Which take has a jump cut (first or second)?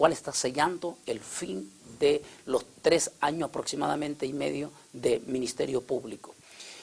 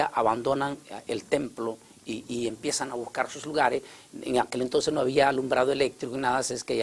first